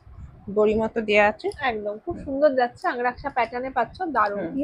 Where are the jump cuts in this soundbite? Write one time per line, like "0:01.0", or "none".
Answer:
none